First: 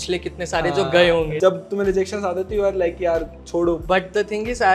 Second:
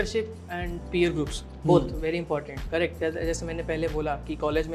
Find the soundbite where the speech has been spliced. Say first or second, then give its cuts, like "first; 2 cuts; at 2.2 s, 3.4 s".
first; 2 cuts; at 1.3 s, 3.8 s